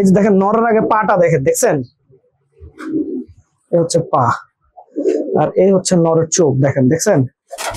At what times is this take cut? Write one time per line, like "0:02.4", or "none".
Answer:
none